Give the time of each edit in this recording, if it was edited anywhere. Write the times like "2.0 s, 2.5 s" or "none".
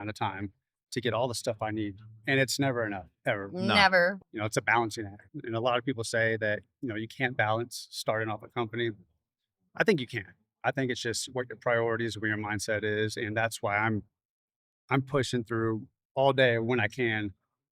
4.1 s, 5.3 s